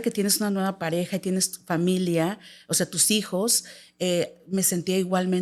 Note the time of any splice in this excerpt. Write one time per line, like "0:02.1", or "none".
none

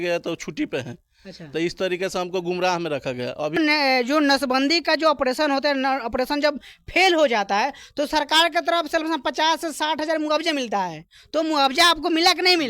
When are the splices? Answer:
0:03.6

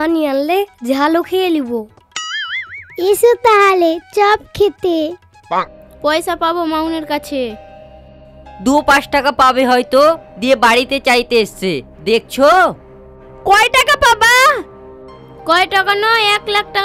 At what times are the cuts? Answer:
0:05.8

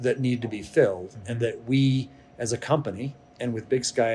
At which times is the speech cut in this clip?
none

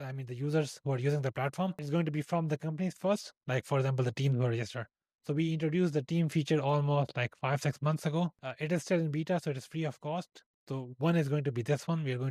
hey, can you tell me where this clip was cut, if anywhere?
none

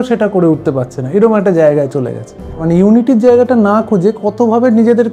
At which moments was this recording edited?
0:02.6

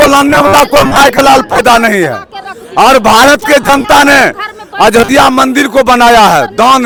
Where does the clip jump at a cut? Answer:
none

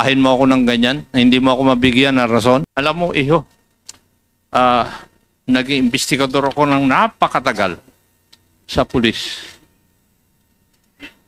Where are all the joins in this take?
0:02.7

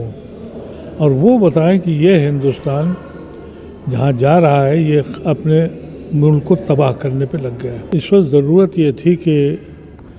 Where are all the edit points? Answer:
0:07.8

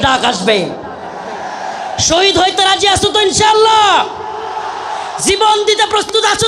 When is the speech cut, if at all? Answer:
none

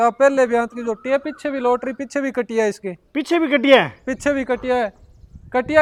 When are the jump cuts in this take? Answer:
none

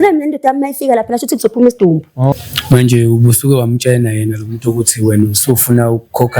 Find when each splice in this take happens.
0:02.3

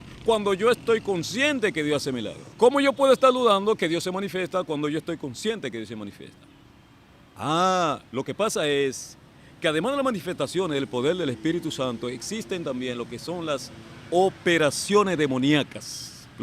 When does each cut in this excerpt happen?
0:02.4

